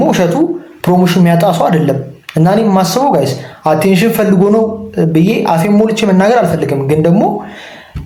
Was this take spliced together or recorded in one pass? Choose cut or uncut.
uncut